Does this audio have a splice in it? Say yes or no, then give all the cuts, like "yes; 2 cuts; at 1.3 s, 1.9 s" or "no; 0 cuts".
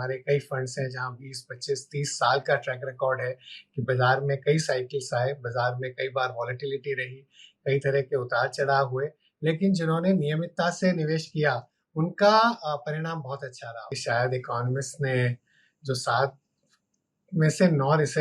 yes; 1 cut; at 13.9 s